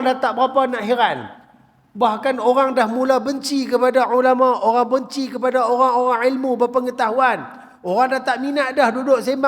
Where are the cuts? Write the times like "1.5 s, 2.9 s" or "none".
none